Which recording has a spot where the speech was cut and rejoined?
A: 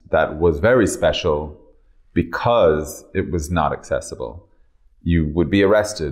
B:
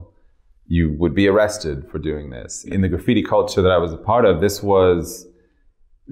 B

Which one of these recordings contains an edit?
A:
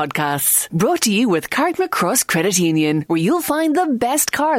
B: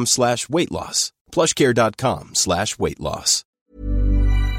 B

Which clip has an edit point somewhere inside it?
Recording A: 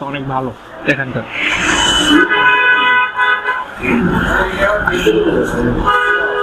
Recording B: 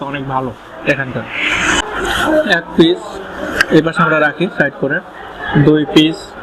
B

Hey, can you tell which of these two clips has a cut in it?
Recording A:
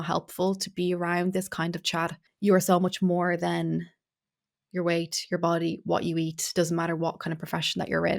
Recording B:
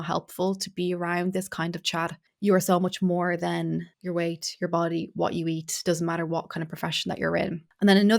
B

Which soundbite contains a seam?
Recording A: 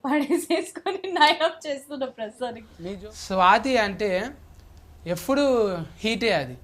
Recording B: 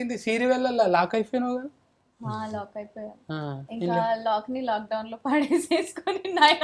A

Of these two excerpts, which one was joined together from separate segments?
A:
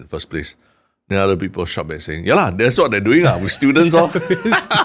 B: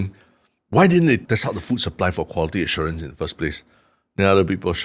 B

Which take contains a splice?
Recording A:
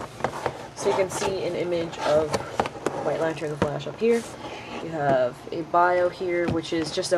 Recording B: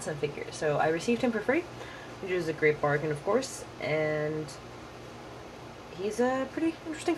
A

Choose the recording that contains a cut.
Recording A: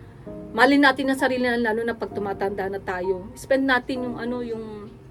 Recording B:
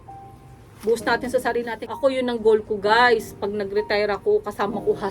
B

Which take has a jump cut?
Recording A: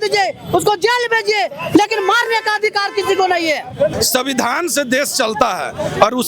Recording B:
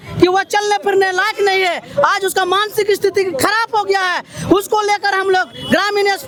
A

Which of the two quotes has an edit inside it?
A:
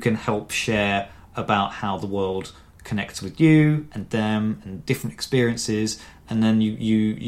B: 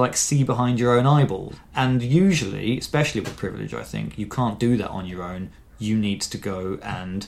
B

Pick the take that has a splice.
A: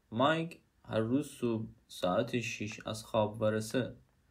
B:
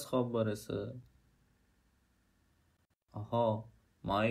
A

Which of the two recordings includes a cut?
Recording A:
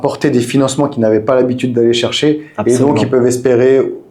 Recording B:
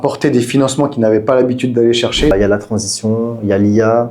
B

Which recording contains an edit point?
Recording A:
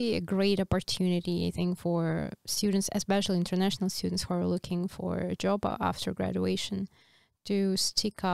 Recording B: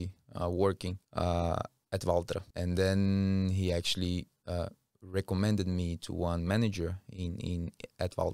B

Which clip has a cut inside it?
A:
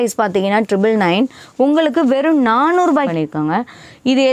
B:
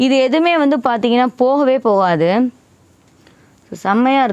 A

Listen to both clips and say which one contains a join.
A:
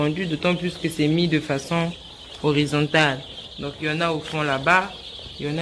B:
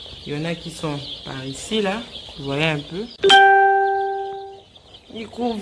B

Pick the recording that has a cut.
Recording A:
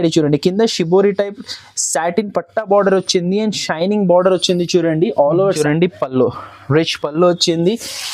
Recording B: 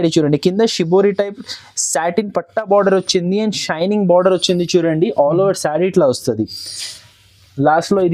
A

